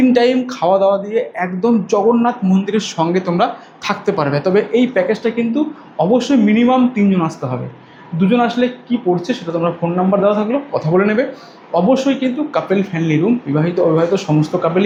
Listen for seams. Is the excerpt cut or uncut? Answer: uncut